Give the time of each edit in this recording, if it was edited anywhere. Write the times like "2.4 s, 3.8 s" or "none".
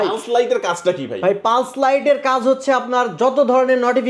none